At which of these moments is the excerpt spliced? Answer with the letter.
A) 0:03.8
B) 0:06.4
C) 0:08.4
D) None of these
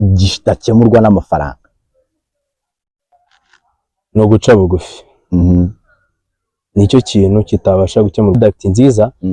C